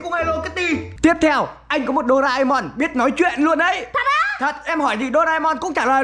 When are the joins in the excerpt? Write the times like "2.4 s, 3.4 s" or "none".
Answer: 0.9 s